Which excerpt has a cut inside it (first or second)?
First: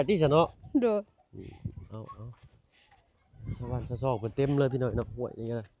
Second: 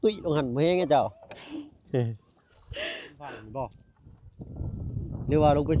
second